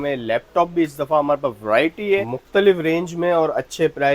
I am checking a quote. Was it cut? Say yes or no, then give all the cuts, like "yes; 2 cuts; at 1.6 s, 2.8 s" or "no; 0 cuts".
yes; 1 cut; at 2.4 s